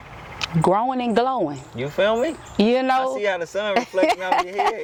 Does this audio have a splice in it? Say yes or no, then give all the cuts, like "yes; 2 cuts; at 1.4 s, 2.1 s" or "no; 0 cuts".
no; 0 cuts